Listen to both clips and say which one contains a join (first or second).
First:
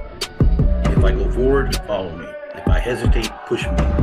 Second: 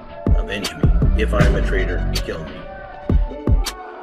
second